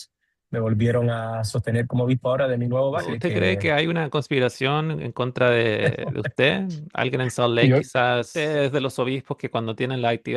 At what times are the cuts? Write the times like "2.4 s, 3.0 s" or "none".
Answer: 3.1 s, 8.3 s